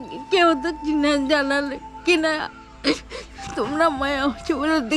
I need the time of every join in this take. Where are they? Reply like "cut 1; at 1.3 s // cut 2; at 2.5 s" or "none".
none

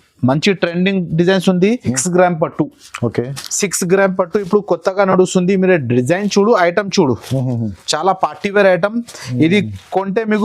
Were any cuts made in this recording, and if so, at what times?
cut 1; at 2.0 s

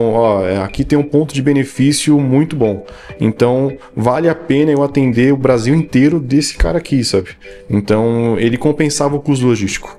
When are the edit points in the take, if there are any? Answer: none

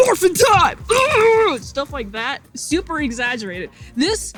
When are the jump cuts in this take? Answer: none

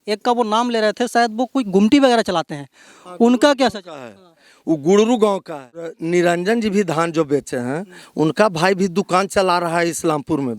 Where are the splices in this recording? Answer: cut 1; at 6.0 s

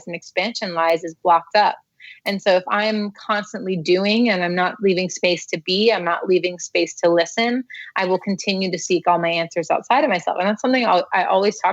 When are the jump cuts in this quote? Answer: none

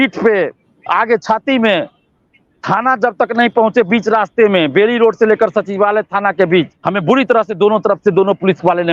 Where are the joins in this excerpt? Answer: cut 1; at 6.8 s

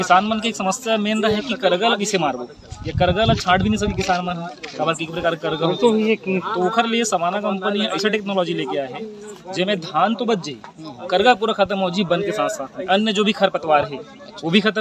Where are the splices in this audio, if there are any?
none

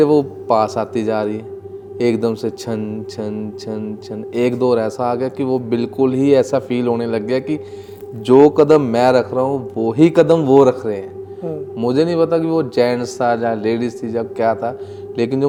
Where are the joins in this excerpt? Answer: none

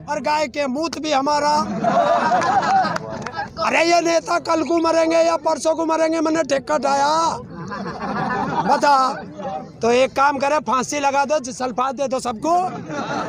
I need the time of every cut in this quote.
cut 1; at 3.5 s // cut 2; at 9.6 s

